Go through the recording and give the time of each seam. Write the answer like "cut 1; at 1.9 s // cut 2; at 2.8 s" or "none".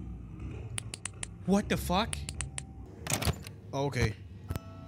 cut 1; at 2.9 s